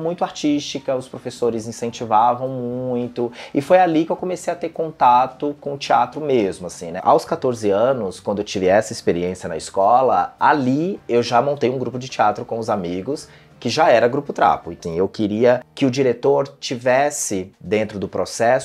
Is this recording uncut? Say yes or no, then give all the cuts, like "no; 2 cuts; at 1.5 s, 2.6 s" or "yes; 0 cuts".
no; 2 cuts; at 6.9 s, 14.7 s